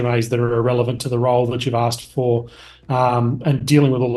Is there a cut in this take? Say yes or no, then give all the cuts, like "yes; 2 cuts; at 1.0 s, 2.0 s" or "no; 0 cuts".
no; 0 cuts